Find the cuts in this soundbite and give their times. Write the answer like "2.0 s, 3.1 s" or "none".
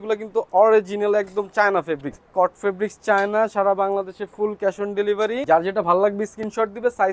2.3 s, 5.4 s